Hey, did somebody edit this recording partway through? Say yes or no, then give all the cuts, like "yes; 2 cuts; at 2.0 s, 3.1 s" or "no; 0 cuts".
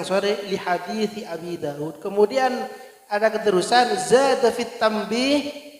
no; 0 cuts